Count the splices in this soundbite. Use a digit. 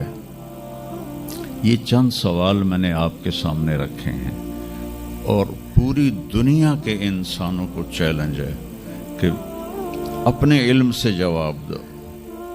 0